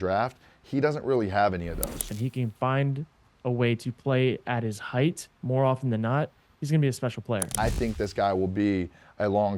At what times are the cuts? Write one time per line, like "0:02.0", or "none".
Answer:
0:02.1
0:07.5